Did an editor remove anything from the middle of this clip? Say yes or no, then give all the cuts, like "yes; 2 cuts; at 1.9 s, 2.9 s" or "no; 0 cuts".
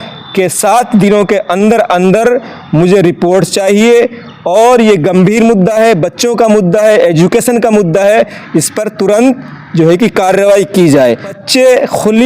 yes; 1 cut; at 11.3 s